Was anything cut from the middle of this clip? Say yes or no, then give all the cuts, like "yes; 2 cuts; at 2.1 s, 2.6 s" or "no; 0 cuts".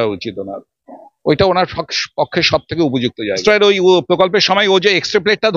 yes; 1 cut; at 3.4 s